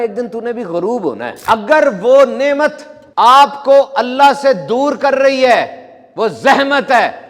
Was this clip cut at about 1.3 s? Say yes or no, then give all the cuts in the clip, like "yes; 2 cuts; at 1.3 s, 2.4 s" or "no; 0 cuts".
yes; 1 cut; at 1.3 s